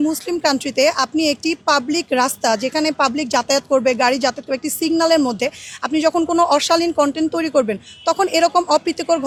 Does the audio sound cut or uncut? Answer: uncut